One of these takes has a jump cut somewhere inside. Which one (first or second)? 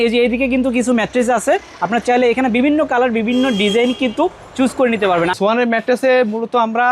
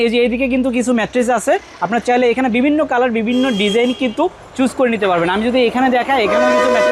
first